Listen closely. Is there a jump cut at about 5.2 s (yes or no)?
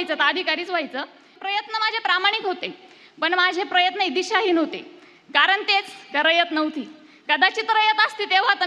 no